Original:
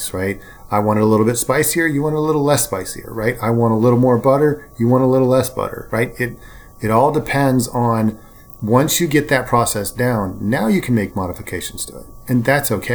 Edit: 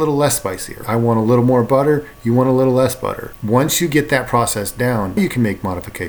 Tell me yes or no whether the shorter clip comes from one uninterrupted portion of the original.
no